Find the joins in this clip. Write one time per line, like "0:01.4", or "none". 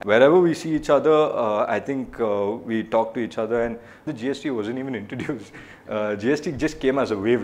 0:04.1